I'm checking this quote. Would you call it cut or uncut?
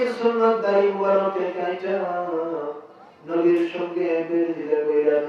uncut